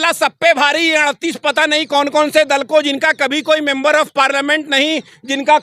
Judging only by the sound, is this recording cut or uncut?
uncut